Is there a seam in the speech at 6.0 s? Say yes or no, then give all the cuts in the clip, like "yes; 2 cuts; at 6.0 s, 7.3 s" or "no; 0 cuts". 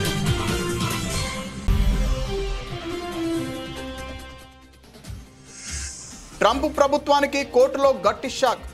yes; 1 cut; at 6.0 s